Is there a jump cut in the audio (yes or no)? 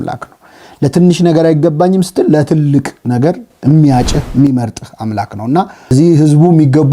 yes